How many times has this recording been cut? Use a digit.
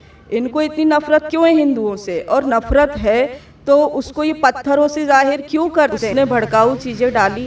1